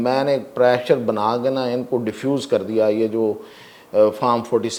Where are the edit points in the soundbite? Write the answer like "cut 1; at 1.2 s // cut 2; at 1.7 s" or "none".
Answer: none